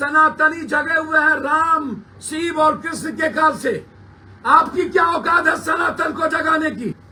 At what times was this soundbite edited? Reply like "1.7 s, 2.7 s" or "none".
none

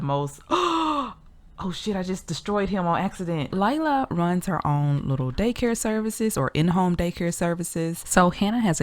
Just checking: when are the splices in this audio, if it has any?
3.5 s, 8.0 s

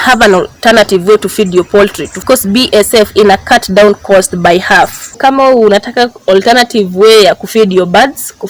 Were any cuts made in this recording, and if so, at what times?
2.2 s, 5.1 s

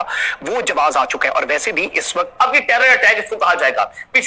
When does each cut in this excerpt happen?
2.3 s

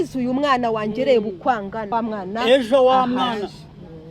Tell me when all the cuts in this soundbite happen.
1.9 s

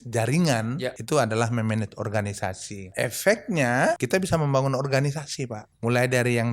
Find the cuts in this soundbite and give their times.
1.0 s, 2.9 s, 4.0 s, 5.6 s

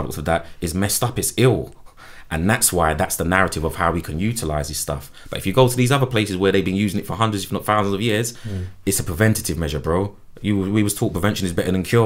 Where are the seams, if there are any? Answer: none

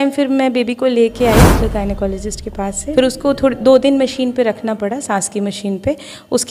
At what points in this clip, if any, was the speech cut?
2.9 s

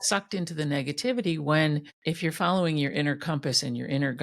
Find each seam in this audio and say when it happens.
1.9 s

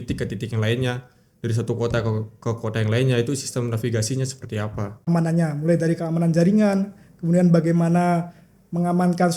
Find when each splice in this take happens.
5.1 s

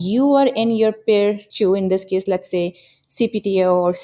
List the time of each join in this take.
1.5 s

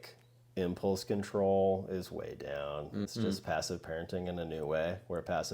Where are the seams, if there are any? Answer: 3.1 s

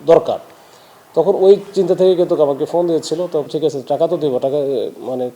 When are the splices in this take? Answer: 3.5 s

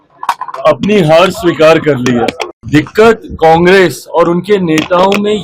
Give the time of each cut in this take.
2.5 s

